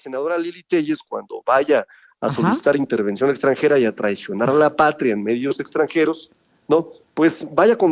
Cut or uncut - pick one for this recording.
uncut